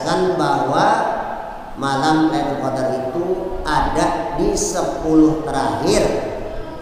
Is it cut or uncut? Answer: uncut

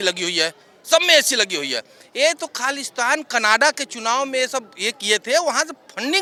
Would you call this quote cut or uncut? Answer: uncut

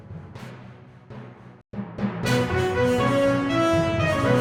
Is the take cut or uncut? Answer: uncut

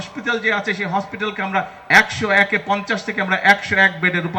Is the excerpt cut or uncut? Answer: uncut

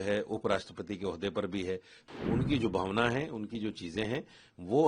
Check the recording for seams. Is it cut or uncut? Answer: cut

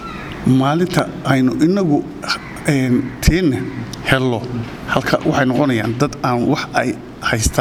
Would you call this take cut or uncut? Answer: uncut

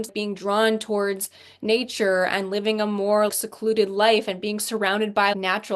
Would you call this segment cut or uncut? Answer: uncut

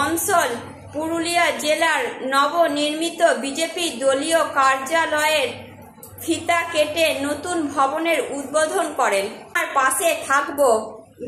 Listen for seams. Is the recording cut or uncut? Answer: cut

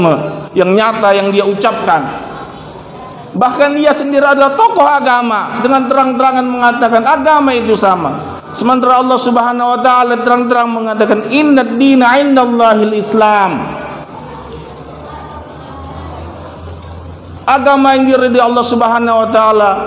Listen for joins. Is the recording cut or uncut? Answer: uncut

